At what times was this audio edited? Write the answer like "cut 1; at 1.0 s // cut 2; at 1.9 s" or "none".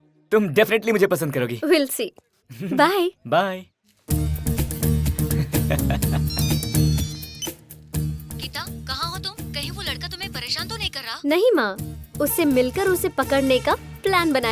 none